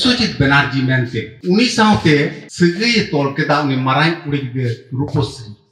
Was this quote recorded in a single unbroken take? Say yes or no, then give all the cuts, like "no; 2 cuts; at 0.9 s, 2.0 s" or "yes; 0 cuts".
no; 1 cut; at 1.3 s